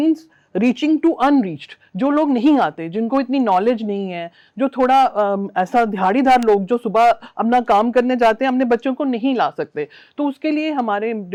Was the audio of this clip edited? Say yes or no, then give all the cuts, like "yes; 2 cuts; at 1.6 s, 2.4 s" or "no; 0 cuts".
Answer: no; 0 cuts